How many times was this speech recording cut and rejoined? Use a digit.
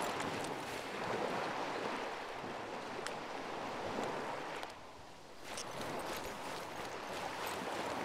1